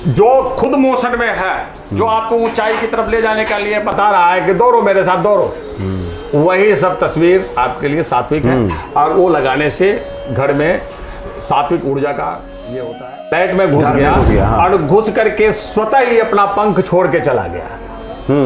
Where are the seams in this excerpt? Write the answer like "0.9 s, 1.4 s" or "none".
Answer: 13.3 s